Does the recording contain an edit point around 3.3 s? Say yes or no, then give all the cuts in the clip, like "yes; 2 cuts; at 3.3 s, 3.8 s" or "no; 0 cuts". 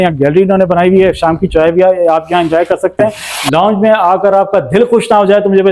yes; 1 cut; at 3.3 s